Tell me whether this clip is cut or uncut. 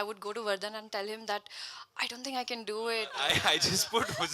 cut